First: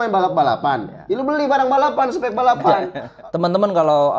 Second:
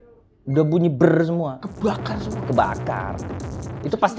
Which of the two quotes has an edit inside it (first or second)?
first